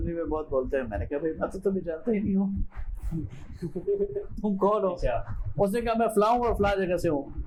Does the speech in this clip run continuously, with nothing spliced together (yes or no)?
yes